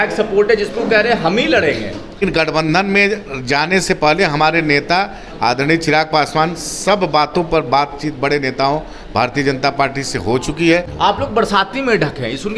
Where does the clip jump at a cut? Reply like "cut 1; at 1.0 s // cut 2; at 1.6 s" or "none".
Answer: cut 1; at 2.2 s // cut 2; at 10.9 s